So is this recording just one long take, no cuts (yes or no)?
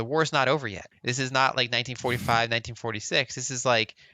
no